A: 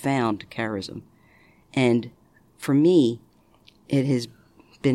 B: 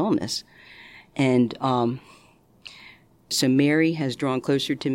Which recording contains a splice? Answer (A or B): B